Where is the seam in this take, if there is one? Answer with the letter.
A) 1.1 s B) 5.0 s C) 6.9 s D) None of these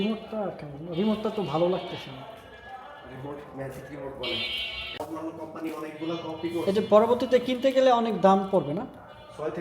B